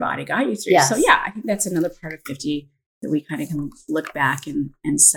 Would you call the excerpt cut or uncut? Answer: uncut